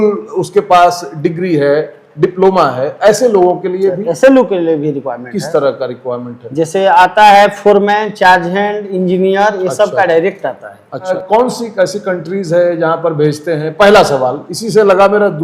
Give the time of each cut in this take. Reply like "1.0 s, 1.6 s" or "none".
11.1 s